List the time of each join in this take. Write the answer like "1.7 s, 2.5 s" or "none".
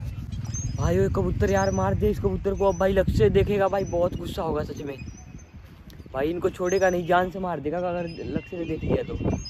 none

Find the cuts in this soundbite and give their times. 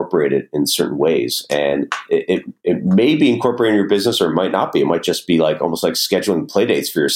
none

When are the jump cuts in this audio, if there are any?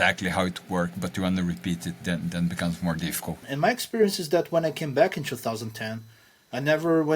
3.4 s

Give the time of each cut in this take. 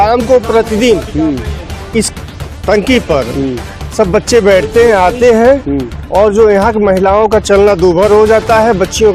none

